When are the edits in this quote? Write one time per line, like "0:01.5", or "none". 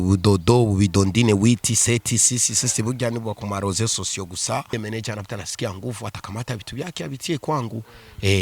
0:04.7